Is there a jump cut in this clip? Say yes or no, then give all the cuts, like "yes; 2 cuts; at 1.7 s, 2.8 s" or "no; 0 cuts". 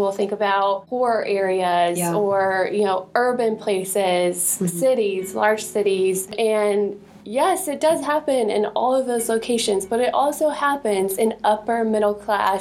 yes; 1 cut; at 6.3 s